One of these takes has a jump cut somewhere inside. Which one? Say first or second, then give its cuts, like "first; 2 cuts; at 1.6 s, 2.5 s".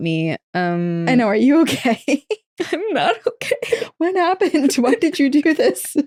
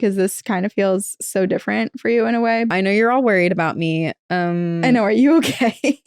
second; 1 cut; at 2.7 s